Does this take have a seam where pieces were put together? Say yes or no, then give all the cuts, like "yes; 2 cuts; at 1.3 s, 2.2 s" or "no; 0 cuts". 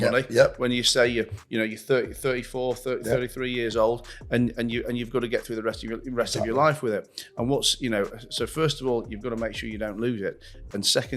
no; 0 cuts